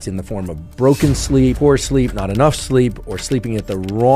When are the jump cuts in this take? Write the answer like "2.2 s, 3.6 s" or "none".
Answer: 1.6 s